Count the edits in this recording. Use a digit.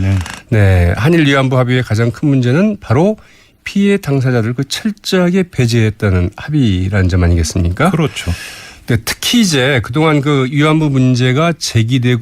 1